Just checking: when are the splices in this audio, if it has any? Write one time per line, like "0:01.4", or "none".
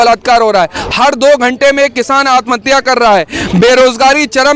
none